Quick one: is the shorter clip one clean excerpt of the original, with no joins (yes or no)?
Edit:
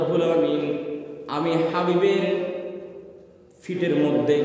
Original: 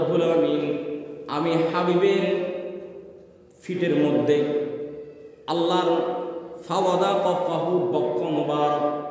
yes